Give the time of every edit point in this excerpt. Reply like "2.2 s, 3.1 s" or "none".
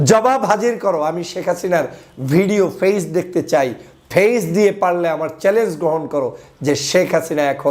none